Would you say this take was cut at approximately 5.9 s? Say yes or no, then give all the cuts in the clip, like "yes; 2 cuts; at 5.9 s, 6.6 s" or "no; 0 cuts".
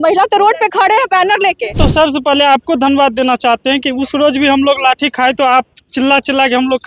no; 1 cut; at 1.8 s